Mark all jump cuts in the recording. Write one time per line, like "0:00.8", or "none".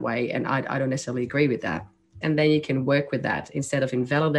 0:02.1